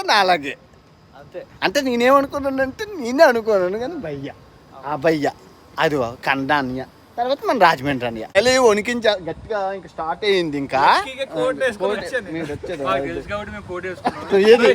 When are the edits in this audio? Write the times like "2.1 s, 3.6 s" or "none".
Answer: 8.3 s

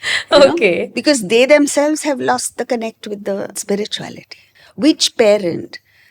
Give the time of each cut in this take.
3.6 s

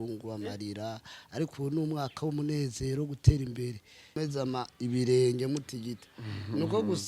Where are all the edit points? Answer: 4.2 s

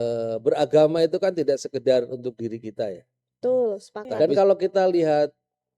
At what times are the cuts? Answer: 4.2 s

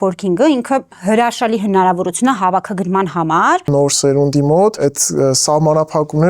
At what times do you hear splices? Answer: 3.6 s, 4.8 s

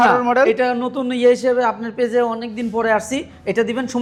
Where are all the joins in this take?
none

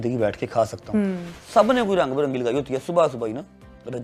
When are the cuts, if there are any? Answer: 1.3 s

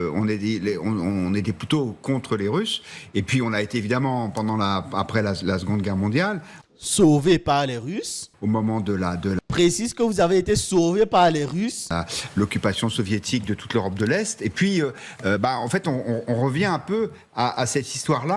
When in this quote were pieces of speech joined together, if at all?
none

